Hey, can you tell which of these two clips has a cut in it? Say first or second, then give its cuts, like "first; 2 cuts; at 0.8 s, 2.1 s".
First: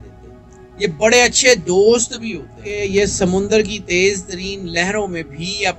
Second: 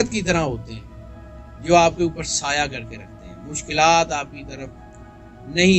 first; 1 cut; at 2.8 s